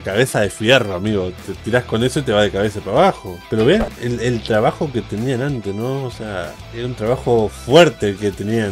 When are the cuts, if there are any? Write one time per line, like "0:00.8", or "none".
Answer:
0:03.4